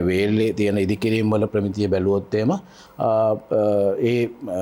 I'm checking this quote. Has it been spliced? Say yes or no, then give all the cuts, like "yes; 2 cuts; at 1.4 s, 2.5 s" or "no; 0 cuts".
no; 0 cuts